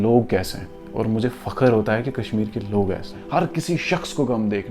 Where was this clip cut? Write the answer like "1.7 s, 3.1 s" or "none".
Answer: 3.1 s